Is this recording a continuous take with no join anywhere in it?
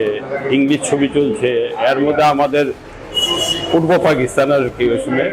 yes; 0 cuts

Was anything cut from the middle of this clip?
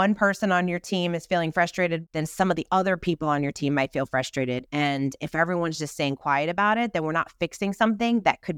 yes; 2 cuts; at 2.0 s, 4.7 s

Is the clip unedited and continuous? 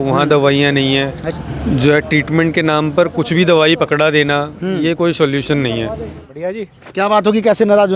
no; 2 cuts; at 1.2 s, 6.2 s

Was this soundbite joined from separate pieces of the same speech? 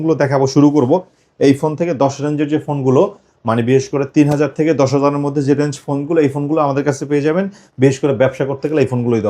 no; 0 cuts

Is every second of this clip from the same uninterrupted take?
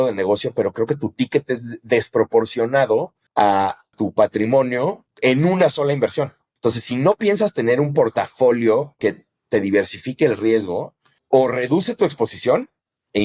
no; 2 cuts; at 5.0 s, 6.4 s

